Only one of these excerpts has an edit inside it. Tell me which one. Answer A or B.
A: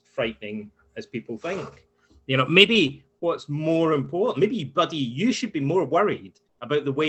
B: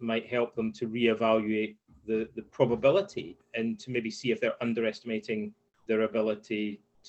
B